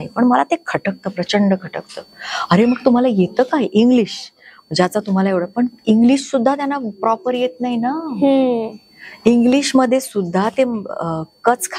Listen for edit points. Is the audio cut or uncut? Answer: uncut